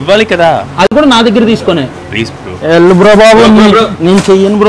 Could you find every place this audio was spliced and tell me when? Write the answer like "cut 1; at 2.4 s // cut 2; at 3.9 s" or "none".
none